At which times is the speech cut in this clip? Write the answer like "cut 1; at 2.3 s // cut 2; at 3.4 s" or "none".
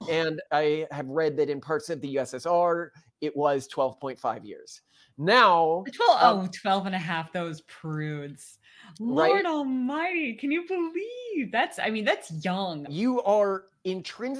cut 1; at 12.9 s